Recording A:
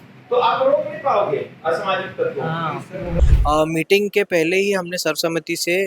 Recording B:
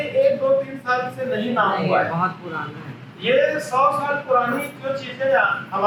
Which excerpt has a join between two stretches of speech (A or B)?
A